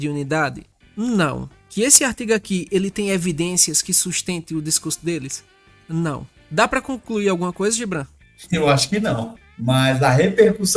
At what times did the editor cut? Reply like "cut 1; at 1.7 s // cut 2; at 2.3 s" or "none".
cut 1; at 9.4 s